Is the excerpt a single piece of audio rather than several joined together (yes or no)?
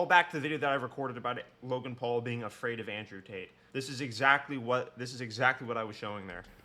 no